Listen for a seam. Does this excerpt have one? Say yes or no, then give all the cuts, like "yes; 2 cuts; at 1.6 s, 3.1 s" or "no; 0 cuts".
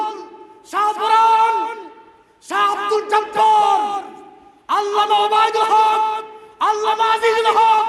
no; 0 cuts